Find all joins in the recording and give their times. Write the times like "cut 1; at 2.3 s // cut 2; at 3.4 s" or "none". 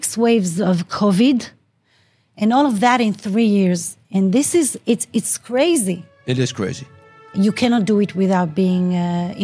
cut 1; at 6.1 s // cut 2; at 7.3 s